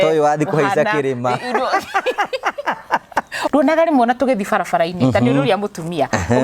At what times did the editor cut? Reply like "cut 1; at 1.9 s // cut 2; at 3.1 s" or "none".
cut 1; at 3.4 s